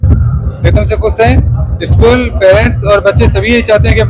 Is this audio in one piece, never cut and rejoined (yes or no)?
yes